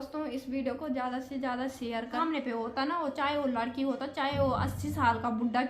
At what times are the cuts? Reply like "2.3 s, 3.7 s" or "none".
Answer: 2.2 s